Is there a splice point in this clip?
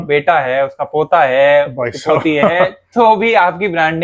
no; 0 cuts

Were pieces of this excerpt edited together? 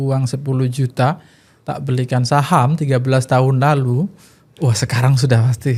no; 0 cuts

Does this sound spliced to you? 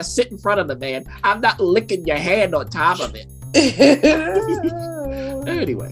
no; 0 cuts

